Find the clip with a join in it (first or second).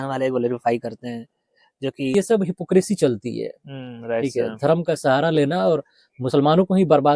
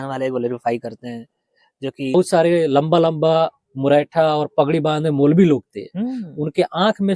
second